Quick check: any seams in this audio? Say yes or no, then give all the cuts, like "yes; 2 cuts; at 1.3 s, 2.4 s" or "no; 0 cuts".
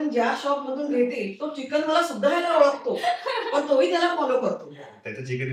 no; 0 cuts